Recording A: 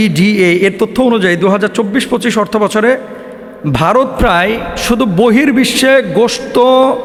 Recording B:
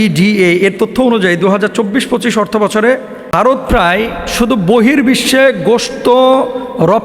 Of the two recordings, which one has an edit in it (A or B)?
B